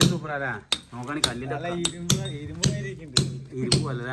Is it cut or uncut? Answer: uncut